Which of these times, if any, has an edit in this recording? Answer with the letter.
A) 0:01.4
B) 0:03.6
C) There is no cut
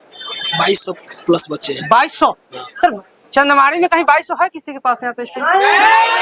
C